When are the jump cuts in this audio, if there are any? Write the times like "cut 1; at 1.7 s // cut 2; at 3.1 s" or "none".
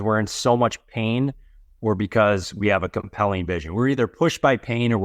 none